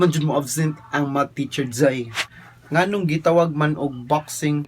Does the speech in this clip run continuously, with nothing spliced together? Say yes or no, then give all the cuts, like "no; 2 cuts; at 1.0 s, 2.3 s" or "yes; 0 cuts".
no; 1 cut; at 2.1 s